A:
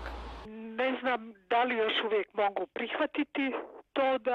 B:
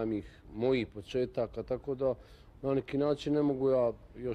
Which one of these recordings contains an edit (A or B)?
A